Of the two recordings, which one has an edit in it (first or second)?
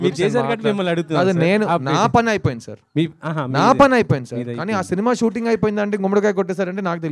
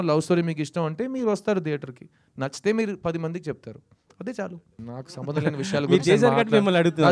second